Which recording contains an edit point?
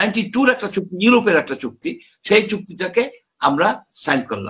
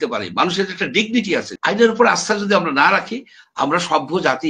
second; 1 cut; at 1.5 s

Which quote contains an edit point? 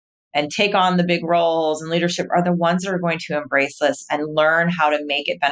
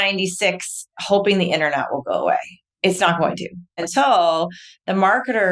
second; 2 cuts; at 2.6 s, 3.7 s

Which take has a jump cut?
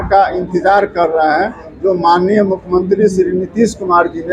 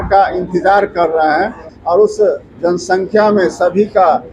second; 1 cut; at 1.7 s

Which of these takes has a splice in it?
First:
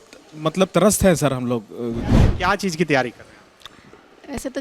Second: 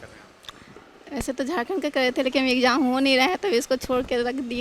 first; 1 cut; at 2.1 s

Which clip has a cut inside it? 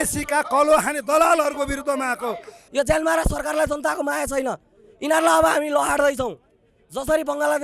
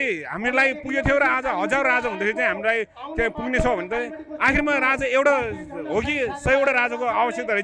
first; 1 cut; at 2.7 s

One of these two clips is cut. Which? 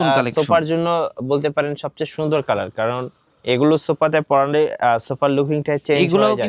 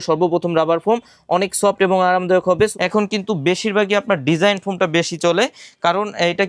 second; 1 cut; at 2.7 s

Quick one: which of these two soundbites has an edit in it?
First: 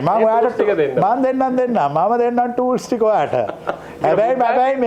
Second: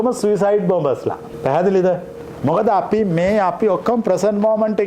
second; 1 cut; at 1.3 s

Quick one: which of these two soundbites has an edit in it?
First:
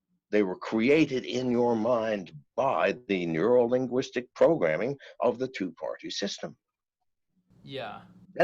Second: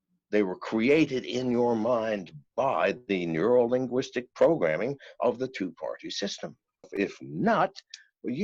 second; 1 cut; at 6.9 s

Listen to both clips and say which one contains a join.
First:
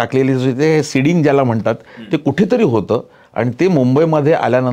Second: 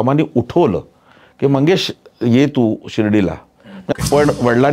second; 1 cut; at 3.8 s

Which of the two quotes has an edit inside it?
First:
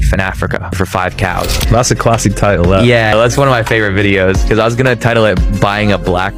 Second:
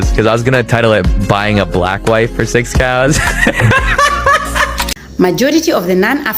second; 1 cut; at 4.9 s

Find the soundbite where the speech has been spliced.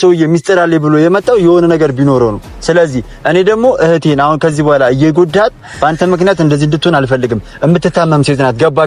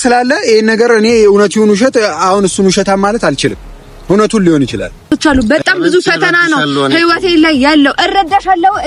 second; 1 cut; at 5.1 s

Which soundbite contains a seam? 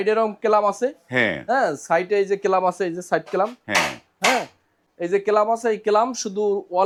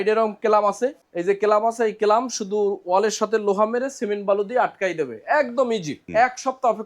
second; 2 cuts; at 1.0 s, 5.9 s

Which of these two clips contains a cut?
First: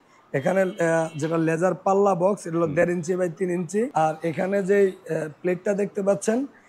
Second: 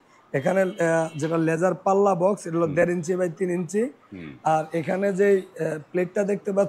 first; 1 cut; at 3.9 s

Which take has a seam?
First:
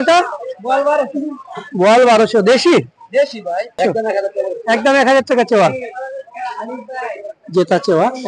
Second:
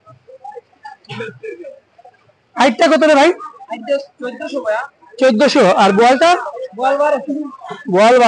first; 1 cut; at 3.8 s

